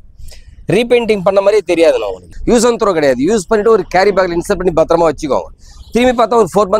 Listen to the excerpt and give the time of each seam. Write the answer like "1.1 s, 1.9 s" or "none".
2.2 s